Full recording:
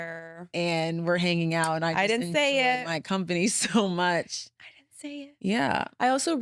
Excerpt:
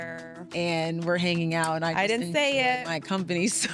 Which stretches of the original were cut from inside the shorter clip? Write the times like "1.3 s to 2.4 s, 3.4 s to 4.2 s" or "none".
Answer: none